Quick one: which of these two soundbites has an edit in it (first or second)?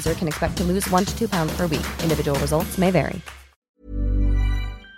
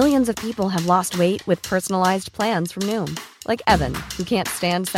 first